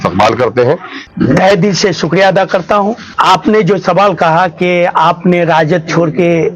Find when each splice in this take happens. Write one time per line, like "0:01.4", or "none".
0:01.0
0:03.1